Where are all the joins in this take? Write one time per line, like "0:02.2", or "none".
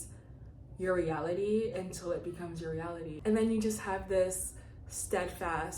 0:03.2